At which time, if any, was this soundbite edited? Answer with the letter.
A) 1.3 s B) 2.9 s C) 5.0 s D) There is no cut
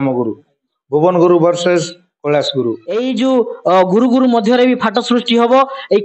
B